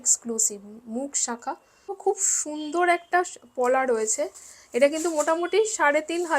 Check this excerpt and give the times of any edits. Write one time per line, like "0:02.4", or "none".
0:02.0